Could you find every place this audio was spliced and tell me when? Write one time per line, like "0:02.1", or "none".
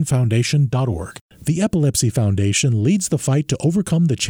0:01.2